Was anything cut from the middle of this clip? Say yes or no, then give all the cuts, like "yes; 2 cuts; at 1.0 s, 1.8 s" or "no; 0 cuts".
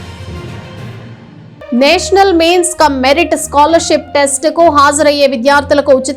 no; 0 cuts